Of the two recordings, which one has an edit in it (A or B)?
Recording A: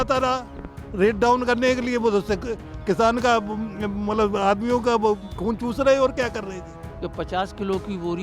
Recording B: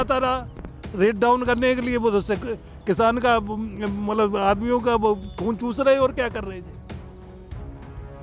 A